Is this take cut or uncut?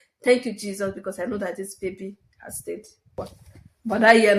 cut